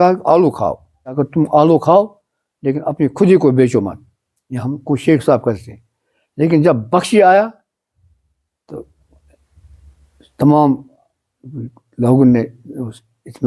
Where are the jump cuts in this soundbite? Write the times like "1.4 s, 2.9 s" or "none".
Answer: 1.2 s